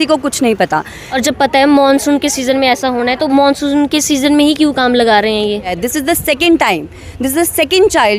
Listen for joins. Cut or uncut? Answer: cut